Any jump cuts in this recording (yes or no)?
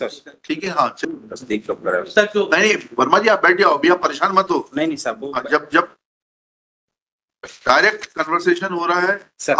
yes